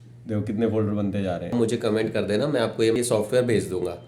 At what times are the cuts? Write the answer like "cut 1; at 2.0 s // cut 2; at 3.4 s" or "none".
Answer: cut 1; at 1.5 s